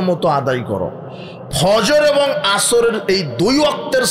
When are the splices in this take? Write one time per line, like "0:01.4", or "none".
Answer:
none